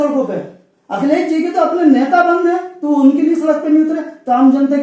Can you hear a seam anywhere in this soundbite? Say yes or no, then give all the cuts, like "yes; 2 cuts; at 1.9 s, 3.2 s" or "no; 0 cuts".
no; 0 cuts